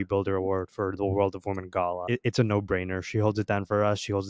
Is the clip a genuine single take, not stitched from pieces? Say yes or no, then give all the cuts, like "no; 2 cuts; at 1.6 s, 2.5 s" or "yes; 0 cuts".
no; 1 cut; at 2.0 s